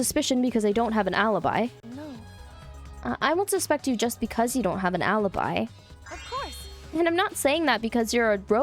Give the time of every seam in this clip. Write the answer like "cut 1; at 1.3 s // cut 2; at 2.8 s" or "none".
none